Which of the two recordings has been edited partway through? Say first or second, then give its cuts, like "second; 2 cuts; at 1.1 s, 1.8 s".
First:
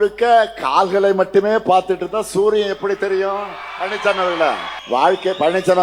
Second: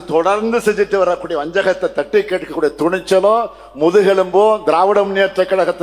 first; 1 cut; at 4.7 s